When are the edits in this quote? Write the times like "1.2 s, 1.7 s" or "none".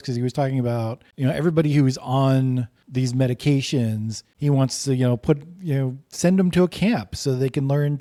none